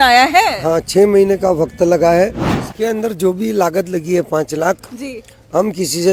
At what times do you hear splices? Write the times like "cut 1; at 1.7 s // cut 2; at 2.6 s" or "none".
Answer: none